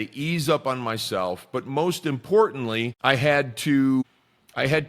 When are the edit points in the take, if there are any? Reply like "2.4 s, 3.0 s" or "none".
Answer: 2.9 s, 4.0 s